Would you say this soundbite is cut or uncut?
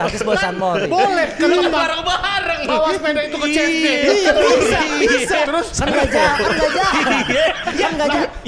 uncut